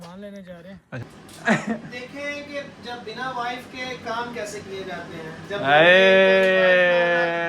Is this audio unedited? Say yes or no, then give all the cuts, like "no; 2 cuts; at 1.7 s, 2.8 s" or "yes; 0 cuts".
no; 1 cut; at 1.1 s